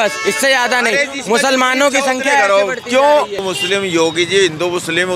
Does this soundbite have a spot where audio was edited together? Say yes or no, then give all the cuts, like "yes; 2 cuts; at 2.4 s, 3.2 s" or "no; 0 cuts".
yes; 1 cut; at 3.5 s